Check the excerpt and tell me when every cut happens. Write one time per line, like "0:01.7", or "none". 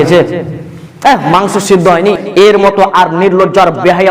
0:02.2